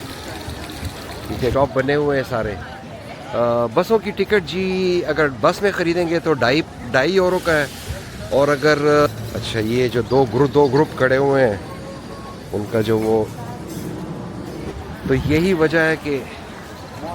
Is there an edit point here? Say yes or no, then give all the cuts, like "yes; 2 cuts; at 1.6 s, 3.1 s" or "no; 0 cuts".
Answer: yes; 3 cuts; at 1.5 s, 9.1 s, 14.7 s